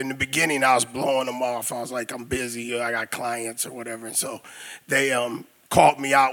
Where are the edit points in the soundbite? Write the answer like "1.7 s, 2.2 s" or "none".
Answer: none